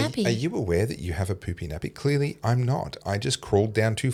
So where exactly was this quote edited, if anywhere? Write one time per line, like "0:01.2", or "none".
none